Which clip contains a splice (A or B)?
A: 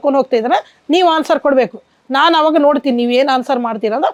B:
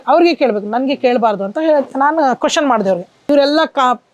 B